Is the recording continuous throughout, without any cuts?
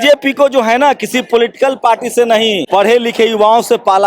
no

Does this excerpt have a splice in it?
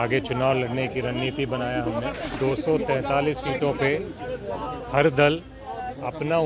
yes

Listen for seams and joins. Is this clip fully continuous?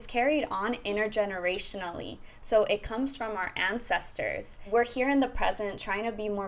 no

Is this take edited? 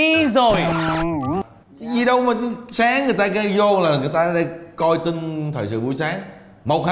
yes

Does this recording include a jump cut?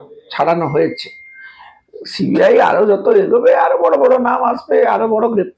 no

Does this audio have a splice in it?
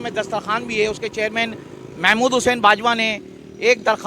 no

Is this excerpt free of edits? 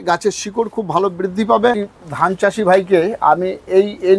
no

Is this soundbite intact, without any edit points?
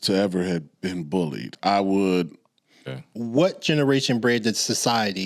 no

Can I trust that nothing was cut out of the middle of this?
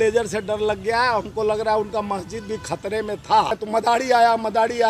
no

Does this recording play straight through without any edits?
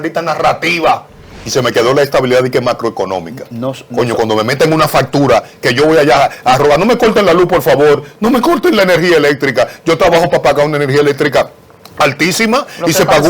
no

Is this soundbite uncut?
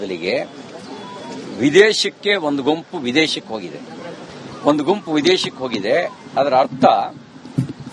no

